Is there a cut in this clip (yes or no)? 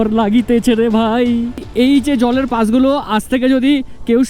yes